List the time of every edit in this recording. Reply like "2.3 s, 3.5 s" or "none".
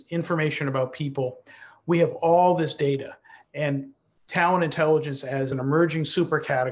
5.5 s